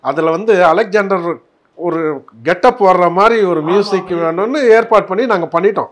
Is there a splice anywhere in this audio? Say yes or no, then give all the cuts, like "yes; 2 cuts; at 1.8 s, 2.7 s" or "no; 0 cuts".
no; 0 cuts